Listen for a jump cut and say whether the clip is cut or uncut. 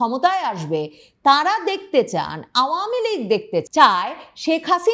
cut